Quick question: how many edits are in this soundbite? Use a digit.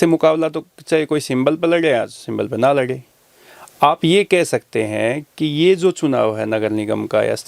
0